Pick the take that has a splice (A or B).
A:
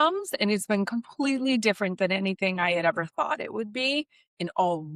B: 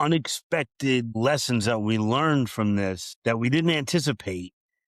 B